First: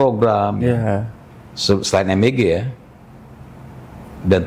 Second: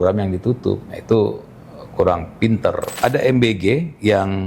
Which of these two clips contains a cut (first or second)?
second